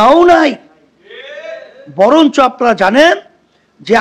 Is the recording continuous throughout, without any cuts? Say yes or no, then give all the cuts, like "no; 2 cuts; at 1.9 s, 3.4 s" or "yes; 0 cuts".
yes; 0 cuts